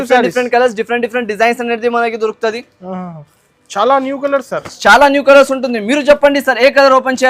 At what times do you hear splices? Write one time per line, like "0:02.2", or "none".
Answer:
none